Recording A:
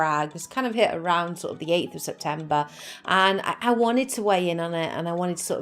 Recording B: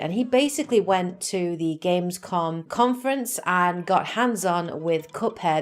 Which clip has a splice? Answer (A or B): B